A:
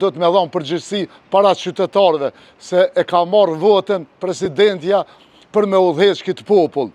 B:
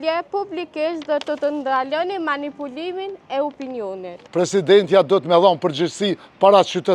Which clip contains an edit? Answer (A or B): B